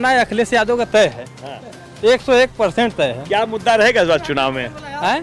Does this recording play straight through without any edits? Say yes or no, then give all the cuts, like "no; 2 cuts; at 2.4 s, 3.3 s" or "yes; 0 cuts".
yes; 0 cuts